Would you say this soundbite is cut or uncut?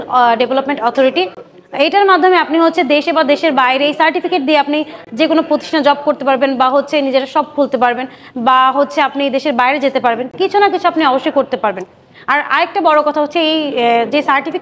uncut